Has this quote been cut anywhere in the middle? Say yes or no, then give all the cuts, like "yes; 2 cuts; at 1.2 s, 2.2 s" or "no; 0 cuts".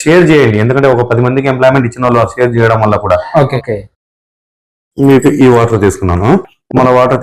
yes; 1 cut; at 3.5 s